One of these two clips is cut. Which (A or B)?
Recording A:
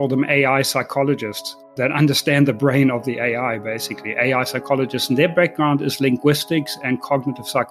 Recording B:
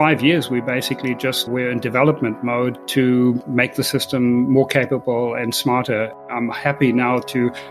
B